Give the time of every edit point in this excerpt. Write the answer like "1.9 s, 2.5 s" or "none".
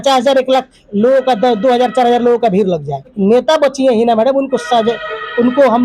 3.2 s

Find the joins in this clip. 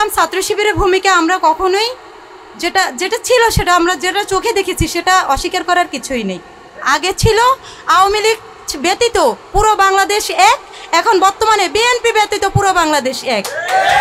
6.8 s

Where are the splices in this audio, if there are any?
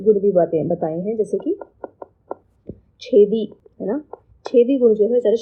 none

